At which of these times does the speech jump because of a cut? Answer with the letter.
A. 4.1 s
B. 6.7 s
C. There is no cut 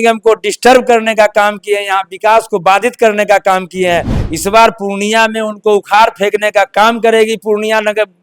A